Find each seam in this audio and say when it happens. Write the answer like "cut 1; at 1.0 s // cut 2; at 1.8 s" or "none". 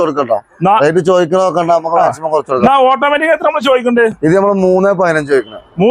cut 1; at 2.6 s